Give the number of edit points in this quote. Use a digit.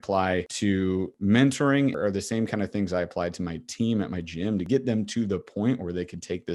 3